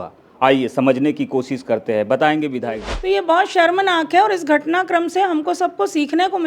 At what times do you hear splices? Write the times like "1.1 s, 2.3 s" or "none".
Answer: 2.9 s